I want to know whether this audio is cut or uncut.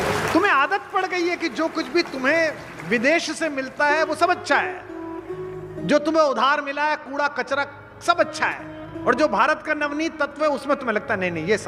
uncut